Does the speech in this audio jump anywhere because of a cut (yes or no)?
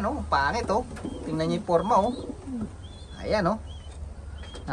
no